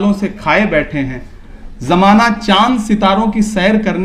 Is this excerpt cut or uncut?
uncut